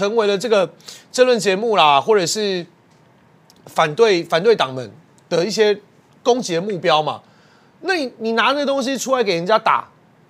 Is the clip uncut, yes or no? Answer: yes